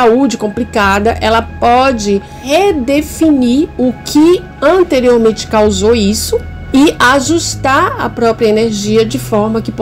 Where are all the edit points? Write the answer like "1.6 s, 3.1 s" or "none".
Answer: none